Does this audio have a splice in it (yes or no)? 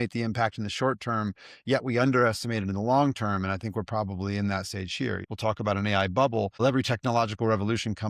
yes